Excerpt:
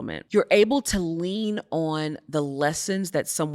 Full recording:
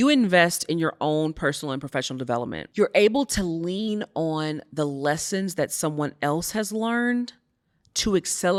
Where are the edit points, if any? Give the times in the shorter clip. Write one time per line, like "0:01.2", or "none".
none